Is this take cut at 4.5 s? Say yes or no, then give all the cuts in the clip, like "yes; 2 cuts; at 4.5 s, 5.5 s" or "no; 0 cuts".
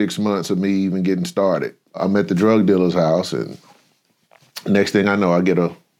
no; 1 cut; at 2.0 s